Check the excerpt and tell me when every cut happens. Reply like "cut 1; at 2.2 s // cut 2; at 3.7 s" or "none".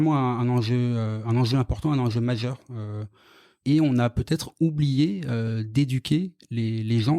cut 1; at 3.6 s